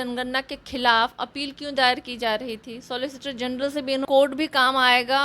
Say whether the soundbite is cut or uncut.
cut